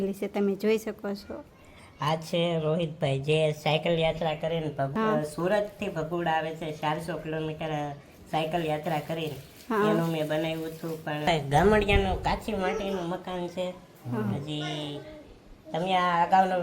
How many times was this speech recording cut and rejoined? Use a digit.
2